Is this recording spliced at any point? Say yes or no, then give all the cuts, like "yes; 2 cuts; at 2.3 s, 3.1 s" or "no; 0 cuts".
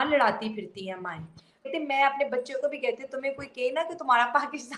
yes; 1 cut; at 1.7 s